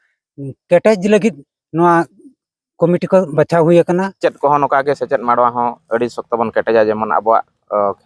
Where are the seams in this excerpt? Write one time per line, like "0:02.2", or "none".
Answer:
0:04.2